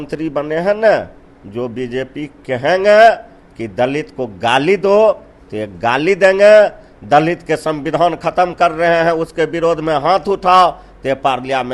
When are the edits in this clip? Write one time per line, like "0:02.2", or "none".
none